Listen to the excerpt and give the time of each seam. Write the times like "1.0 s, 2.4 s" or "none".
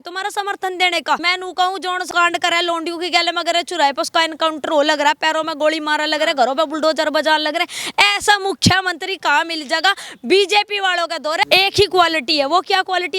1.3 s